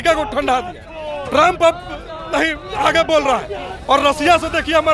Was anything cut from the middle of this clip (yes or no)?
no